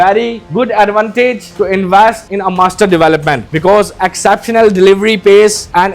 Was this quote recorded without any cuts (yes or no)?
no